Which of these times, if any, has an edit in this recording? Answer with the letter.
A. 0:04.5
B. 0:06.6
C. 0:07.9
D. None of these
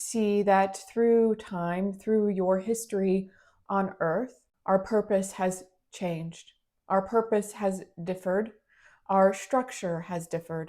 A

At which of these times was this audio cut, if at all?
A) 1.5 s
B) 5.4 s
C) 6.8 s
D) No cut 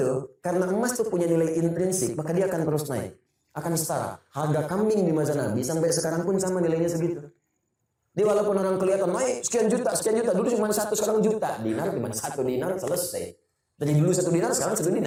D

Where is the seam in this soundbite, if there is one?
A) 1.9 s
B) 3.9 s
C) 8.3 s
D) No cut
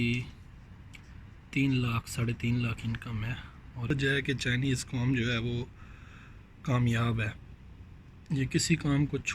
B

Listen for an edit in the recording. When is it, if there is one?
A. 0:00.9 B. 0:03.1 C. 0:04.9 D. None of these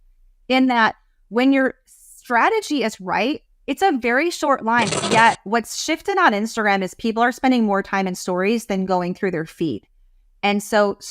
C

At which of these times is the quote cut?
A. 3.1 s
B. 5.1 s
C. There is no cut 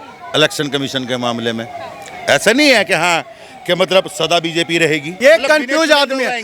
B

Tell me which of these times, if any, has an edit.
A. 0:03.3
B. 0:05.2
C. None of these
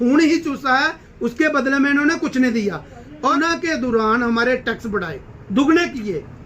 A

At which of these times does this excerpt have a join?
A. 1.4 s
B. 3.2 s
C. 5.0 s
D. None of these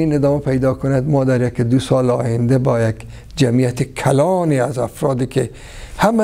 D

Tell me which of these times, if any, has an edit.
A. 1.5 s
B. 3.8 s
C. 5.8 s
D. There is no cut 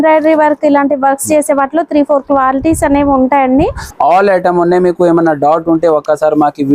B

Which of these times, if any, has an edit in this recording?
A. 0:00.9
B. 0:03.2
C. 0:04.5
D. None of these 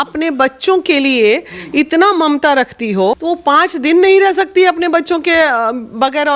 B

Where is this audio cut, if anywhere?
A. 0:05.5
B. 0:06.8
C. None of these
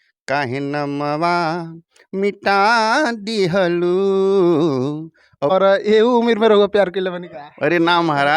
A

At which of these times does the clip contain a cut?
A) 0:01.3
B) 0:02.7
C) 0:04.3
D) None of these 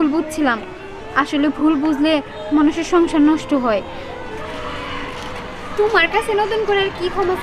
C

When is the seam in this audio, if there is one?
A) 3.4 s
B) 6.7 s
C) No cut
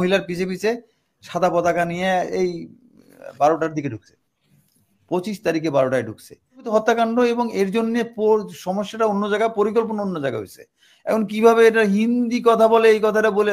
B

